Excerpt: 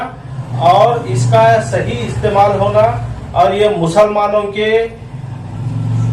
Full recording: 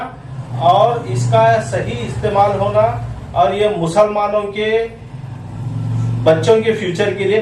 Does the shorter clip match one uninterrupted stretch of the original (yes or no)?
yes